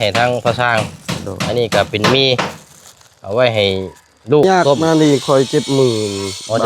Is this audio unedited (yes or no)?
no